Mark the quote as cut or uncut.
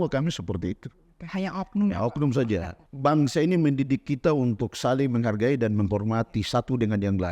cut